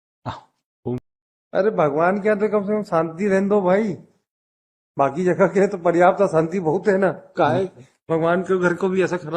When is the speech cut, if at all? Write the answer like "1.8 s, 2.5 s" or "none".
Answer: 1.0 s